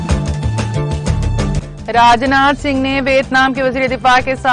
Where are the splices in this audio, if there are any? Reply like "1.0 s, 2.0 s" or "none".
1.6 s

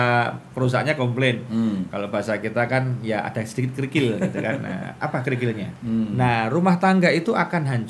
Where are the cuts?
5.7 s

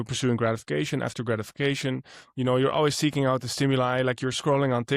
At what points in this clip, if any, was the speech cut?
none

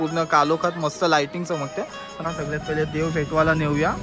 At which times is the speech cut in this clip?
2.2 s

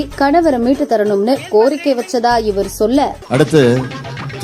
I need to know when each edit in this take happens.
3.2 s

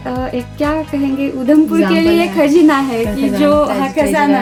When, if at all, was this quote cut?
none

